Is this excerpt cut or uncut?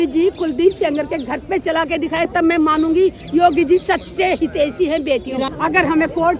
cut